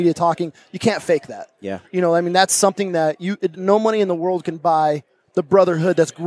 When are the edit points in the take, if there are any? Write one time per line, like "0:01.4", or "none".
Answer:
none